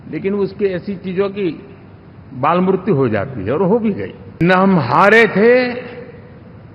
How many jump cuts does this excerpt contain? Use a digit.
1